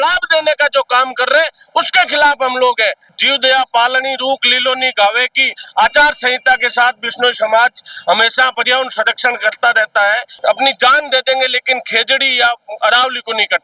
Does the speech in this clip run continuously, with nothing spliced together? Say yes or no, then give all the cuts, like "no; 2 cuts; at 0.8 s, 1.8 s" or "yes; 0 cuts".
no; 2 cuts; at 3.1 s, 10.3 s